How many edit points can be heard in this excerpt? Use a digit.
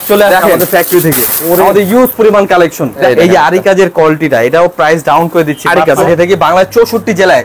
2